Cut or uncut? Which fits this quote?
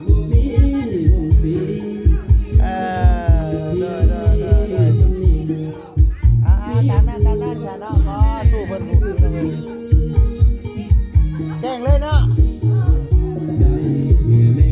uncut